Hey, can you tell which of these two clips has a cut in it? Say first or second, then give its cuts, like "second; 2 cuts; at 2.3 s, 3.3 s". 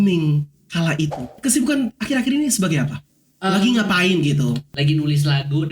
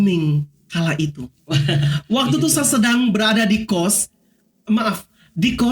first; 2 cuts; at 1.4 s, 4.7 s